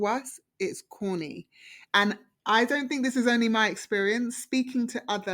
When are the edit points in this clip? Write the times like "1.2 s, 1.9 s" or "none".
1.8 s